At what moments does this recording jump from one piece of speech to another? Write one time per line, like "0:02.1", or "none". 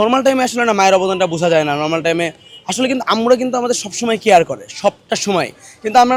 none